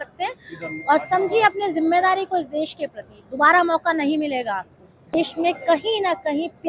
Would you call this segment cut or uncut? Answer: cut